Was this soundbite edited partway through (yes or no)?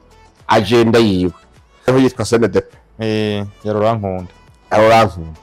yes